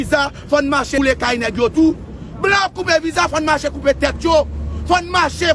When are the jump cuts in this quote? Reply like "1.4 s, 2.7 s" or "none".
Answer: 0.9 s